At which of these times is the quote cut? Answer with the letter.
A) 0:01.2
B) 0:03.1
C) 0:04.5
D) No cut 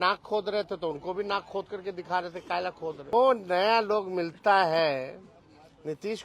B